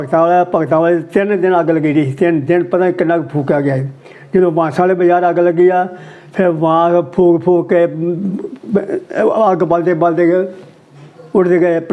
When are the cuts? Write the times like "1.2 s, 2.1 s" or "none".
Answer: none